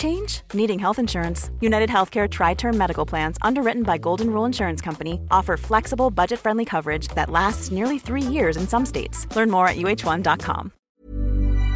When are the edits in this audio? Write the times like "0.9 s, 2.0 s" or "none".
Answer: 10.8 s